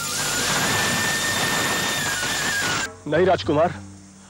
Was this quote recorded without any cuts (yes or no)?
no